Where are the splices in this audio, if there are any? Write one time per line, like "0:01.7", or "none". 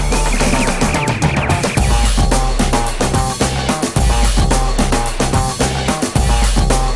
0:04.6